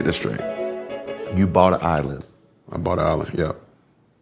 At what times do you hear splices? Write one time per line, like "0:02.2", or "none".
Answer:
none